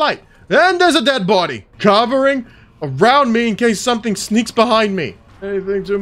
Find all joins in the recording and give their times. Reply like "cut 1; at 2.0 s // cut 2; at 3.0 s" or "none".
none

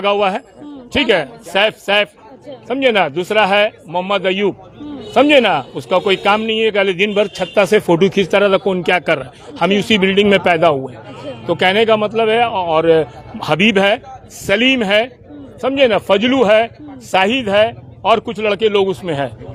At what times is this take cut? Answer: none

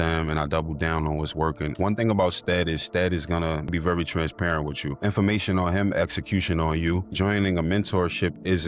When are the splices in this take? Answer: cut 1; at 1.7 s // cut 2; at 3.7 s // cut 3; at 5.0 s // cut 4; at 7.1 s

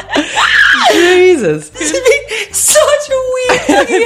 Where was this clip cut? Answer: cut 1; at 1.8 s

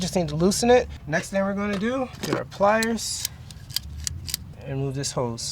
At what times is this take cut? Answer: cut 1; at 1.0 s // cut 2; at 2.2 s // cut 3; at 4.6 s

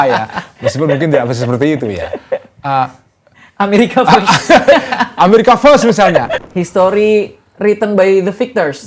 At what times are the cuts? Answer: cut 1; at 6.4 s

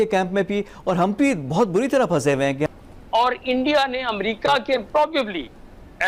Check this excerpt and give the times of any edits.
none

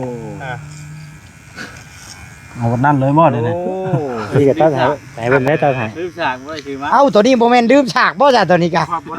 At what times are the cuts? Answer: cut 1; at 4.2 s

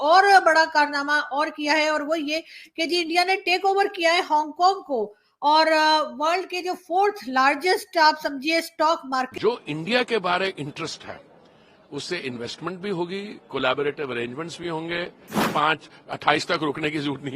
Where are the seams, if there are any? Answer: cut 1; at 9.3 s // cut 2; at 15.5 s

